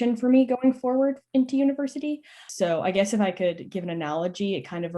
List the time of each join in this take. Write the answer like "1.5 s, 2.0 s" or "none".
2.5 s